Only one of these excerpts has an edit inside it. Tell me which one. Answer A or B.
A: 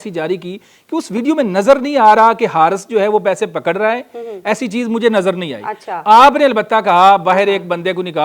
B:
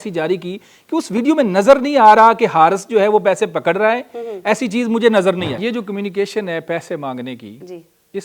B